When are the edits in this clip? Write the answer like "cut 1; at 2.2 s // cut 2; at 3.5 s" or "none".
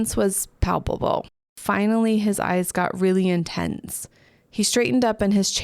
cut 1; at 1.6 s